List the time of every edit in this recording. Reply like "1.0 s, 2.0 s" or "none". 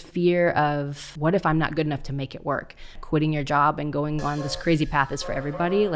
1.0 s, 3.0 s